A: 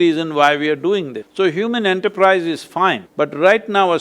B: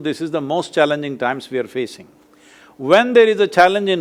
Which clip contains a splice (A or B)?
A